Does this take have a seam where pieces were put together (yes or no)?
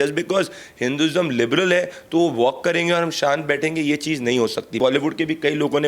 yes